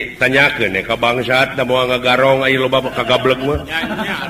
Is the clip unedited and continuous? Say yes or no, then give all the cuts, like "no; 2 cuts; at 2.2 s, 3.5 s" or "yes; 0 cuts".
yes; 0 cuts